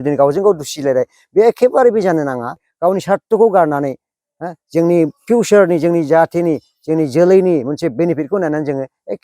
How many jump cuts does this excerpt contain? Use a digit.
1